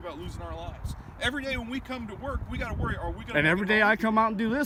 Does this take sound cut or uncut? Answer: uncut